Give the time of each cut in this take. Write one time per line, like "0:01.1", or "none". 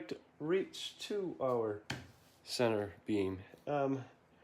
none